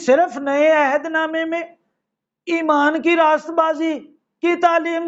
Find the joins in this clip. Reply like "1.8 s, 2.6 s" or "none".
none